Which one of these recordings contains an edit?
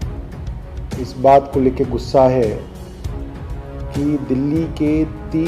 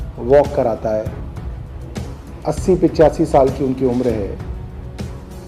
second; 2 cuts; at 1.1 s, 2.4 s

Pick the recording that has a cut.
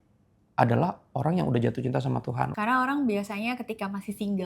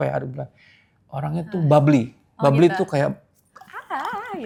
first; 1 cut; at 2.5 s

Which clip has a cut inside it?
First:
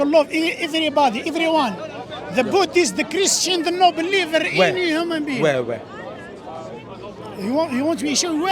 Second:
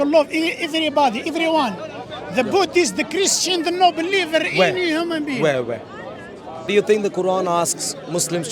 second; 1 cut; at 6.7 s

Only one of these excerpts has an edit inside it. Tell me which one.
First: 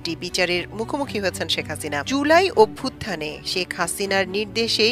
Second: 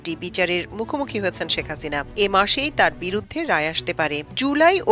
first; 1 cut; at 2.0 s

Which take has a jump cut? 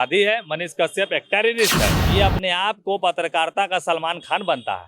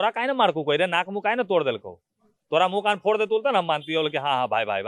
first; 1 cut; at 2.0 s

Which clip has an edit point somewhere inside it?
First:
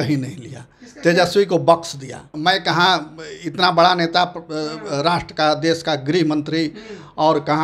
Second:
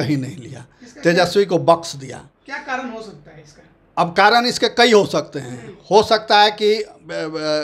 first; 1 cut; at 2.2 s

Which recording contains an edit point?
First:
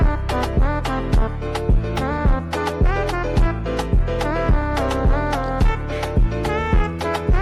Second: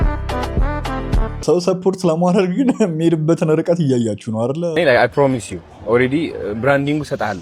second; 2 cuts; at 1.4 s, 4.8 s

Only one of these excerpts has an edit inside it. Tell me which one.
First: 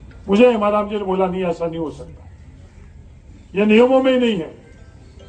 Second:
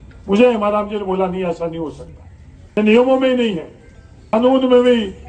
second; 2 cuts; at 2.8 s, 4.3 s

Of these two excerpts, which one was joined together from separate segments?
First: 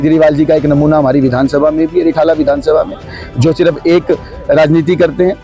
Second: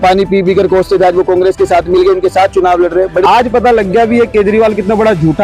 second; 1 cut; at 3.2 s

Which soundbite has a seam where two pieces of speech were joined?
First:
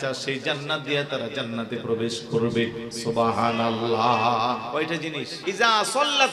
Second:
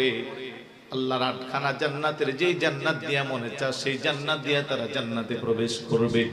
first; 1 cut; at 5.2 s

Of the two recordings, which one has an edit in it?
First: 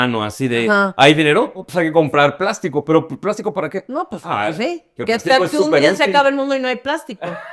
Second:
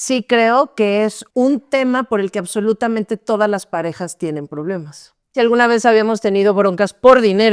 second; 2 cuts; at 1.2 s, 5.3 s

